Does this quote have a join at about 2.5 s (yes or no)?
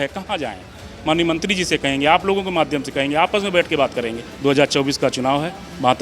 no